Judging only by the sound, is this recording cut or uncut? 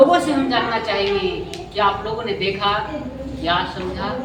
uncut